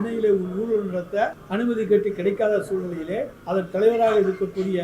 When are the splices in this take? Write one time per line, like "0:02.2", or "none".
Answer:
0:01.4
0:03.3